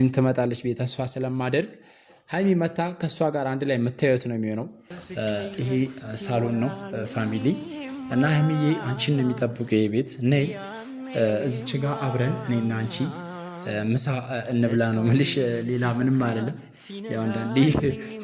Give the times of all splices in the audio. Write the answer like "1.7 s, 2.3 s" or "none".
5.0 s